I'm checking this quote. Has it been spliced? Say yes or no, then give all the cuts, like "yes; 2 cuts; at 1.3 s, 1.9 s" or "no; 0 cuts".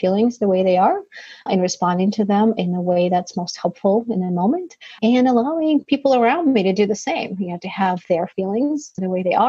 no; 0 cuts